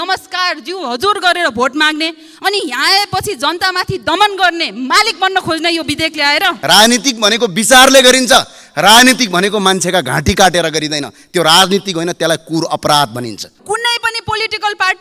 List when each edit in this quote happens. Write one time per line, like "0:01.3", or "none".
0:06.6
0:13.5